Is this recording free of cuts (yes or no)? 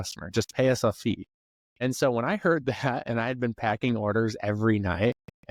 yes